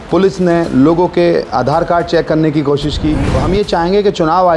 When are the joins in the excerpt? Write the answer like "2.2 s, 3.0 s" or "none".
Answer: 3.3 s

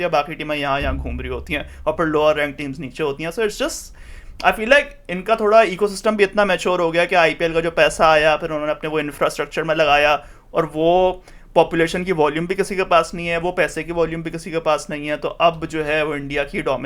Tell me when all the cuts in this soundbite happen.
none

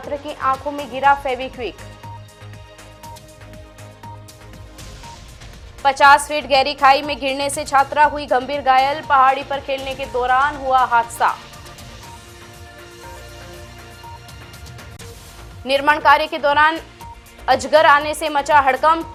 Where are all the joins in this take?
none

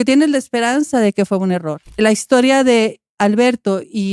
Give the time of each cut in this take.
1.9 s

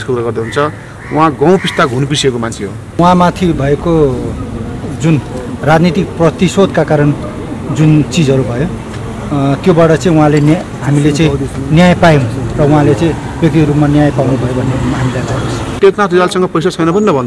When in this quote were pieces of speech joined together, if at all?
3.0 s, 15.8 s

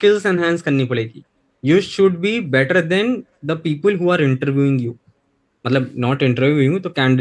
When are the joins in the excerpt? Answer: none

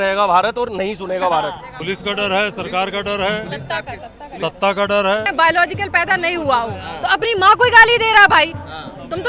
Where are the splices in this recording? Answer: 1.7 s, 5.3 s

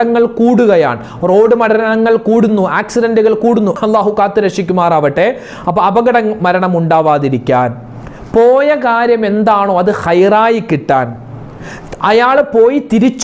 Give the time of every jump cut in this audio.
none

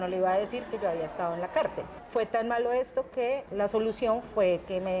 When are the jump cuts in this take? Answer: 1.9 s, 3.5 s

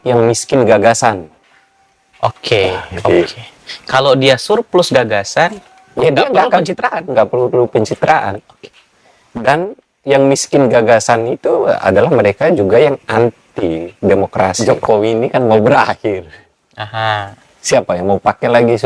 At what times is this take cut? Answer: 14.6 s

